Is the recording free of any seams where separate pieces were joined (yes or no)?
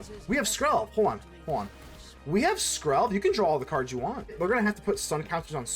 no